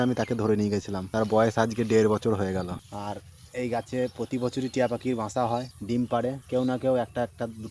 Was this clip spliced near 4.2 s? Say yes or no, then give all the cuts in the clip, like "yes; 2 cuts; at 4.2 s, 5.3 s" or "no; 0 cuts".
no; 4 cuts; at 1.0 s, 2.9 s, 5.7 s, 6.4 s